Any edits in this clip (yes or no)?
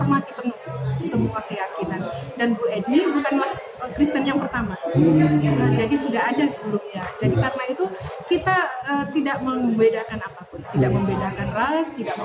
no